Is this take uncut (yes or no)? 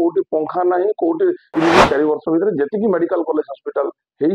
no